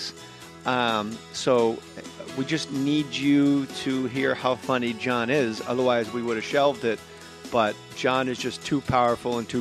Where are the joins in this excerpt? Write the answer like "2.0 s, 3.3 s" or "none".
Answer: 7.0 s